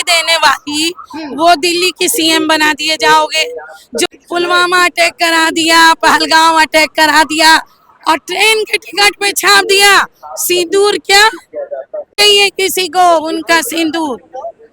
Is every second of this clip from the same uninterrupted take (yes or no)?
no